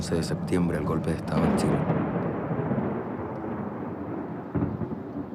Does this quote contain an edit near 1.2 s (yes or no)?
no